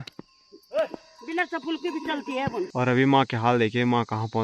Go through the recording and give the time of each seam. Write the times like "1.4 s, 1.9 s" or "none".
2.7 s